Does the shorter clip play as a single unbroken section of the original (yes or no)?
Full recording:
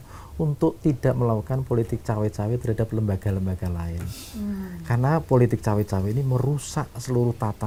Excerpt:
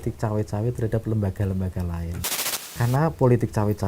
no